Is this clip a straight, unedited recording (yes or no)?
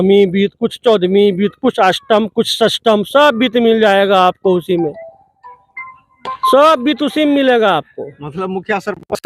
yes